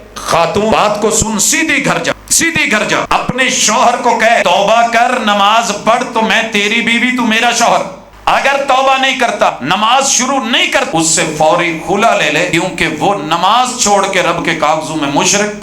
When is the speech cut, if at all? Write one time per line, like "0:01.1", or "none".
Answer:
0:00.7
0:02.1
0:03.1
0:04.4
0:08.0
0:09.5
0:10.9
0:12.5